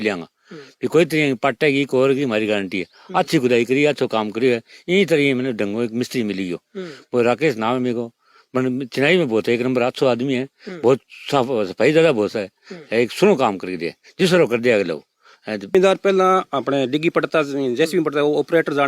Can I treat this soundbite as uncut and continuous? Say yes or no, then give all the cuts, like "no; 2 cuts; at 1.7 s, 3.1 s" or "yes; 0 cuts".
no; 1 cut; at 15.7 s